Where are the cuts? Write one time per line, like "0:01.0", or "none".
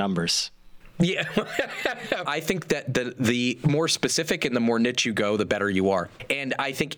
0:02.2
0:06.1